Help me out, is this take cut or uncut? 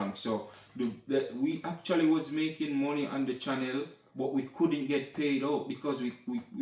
uncut